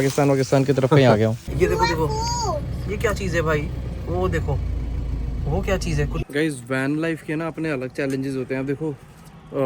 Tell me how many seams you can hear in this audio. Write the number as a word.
two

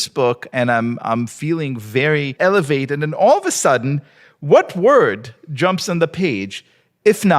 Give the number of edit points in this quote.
one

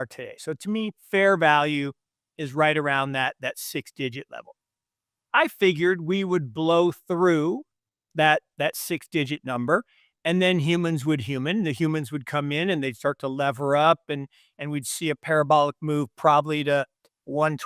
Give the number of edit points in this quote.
zero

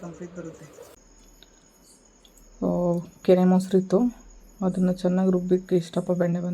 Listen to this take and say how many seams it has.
one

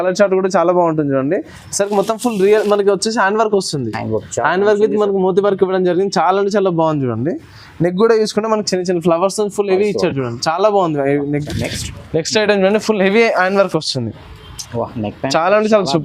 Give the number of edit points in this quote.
one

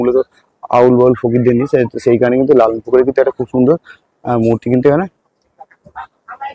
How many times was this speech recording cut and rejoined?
zero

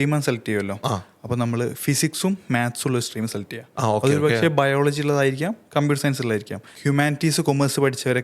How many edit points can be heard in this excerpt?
one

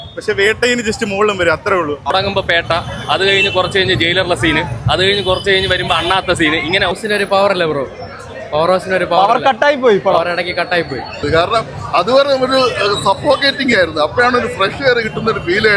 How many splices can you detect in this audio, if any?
three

